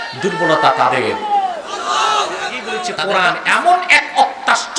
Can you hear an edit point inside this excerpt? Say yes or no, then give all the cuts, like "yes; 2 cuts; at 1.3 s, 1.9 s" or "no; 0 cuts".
yes; 1 cut; at 2.9 s